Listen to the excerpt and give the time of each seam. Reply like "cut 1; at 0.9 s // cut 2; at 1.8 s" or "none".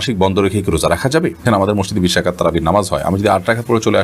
cut 1; at 1.5 s